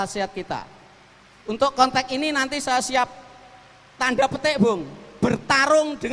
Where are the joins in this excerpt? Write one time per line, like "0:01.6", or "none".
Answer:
none